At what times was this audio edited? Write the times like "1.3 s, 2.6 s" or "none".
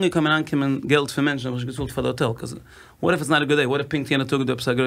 none